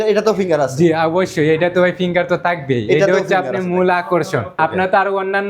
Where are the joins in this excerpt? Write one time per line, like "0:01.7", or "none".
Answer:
0:04.5